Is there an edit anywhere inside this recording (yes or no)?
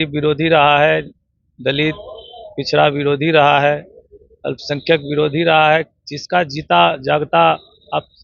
no